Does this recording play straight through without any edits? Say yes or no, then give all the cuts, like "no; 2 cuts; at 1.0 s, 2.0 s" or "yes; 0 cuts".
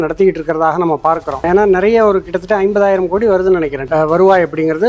no; 2 cuts; at 1.4 s, 3.8 s